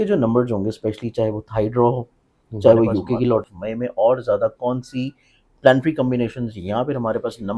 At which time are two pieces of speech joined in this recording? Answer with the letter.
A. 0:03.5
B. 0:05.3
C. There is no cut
A